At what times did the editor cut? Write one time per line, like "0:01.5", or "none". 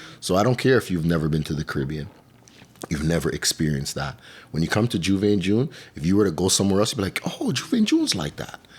none